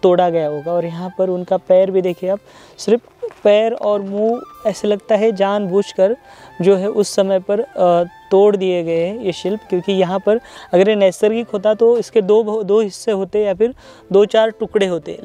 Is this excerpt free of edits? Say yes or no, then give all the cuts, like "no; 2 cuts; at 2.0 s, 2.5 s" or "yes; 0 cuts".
yes; 0 cuts